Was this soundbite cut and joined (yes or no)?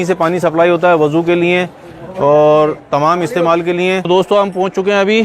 yes